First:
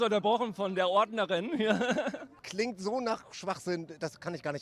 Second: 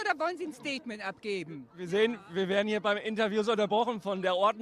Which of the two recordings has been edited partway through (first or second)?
first